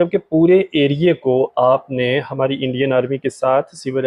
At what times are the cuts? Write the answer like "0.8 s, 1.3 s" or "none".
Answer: none